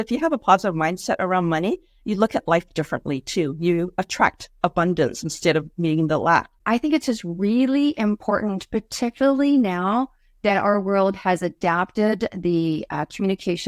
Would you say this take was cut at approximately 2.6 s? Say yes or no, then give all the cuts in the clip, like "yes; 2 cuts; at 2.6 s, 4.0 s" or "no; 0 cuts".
no; 1 cut; at 6.5 s